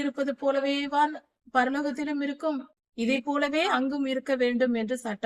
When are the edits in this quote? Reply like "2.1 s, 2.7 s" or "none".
2.8 s, 3.7 s